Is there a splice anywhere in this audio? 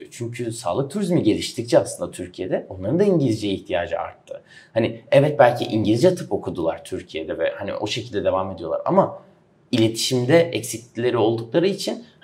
no; 0 cuts

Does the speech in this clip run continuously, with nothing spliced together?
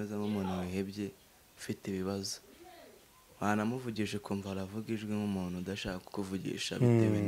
yes; 0 cuts

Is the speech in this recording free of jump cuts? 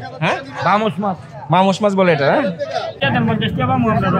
no; 1 cut; at 3.0 s

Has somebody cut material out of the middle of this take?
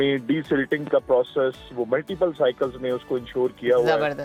no; 0 cuts

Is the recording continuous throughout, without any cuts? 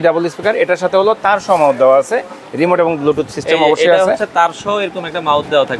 yes; 0 cuts

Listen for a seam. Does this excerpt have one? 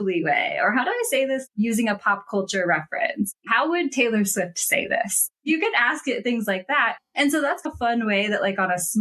yes; 3 cuts; at 1.4 s, 3.3 s, 5.4 s

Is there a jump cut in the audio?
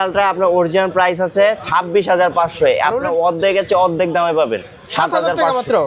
no; 0 cuts

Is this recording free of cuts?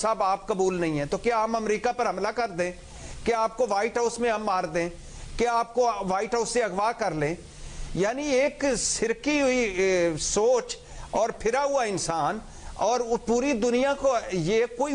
yes; 0 cuts

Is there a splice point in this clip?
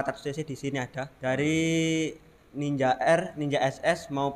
yes; 1 cut; at 1.0 s

